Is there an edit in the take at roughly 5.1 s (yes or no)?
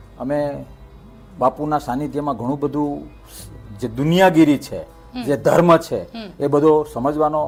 no